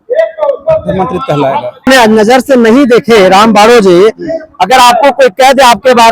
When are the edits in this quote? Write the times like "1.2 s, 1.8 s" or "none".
1.8 s